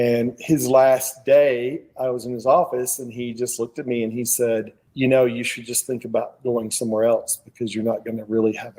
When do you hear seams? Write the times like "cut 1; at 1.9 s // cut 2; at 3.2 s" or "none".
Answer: cut 1; at 4.8 s